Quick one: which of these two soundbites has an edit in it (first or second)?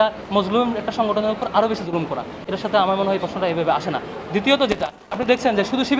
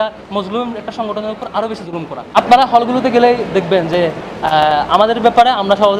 second